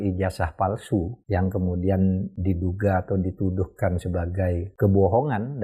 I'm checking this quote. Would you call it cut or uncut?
cut